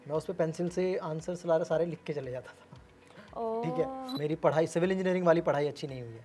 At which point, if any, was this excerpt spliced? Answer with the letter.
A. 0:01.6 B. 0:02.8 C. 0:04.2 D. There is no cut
C